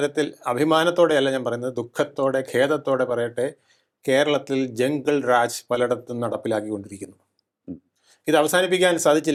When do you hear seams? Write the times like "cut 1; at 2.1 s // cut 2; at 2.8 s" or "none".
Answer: none